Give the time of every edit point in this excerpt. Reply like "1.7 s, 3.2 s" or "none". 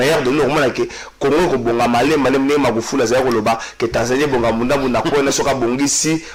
none